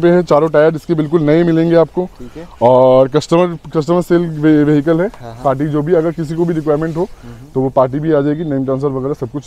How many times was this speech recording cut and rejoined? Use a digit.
0